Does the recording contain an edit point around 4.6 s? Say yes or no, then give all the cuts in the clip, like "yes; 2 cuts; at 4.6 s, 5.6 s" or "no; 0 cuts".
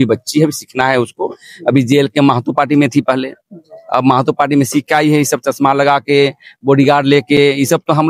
no; 0 cuts